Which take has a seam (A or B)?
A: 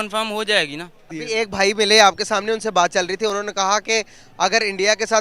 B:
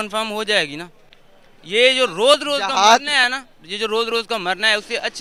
A